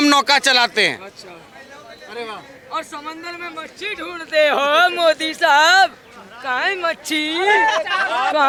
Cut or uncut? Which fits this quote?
uncut